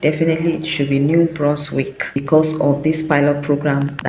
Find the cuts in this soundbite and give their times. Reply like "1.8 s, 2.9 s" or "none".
2.2 s